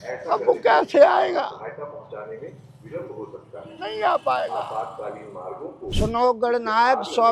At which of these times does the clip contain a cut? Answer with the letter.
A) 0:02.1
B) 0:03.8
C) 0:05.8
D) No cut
C